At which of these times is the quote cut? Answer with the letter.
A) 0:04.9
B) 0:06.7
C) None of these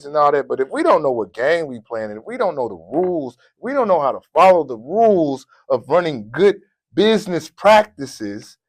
C